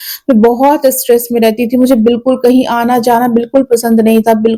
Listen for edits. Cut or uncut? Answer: uncut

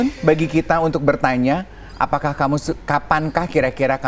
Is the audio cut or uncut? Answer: uncut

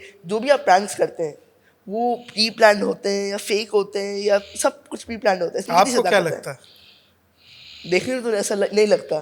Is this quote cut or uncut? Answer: uncut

